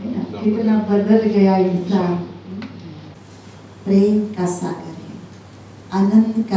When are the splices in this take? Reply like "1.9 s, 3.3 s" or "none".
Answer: 3.1 s